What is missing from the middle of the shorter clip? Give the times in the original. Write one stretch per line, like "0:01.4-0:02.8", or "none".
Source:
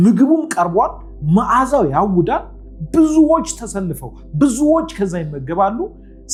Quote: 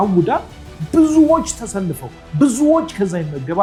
none